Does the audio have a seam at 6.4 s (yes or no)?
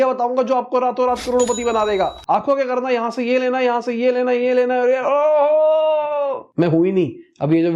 yes